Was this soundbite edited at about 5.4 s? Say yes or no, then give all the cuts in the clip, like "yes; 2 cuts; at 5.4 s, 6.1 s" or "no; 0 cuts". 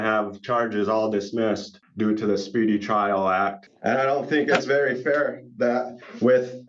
no; 2 cuts; at 1.8 s, 3.7 s